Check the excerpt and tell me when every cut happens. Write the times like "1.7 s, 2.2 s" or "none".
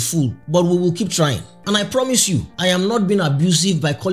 1.5 s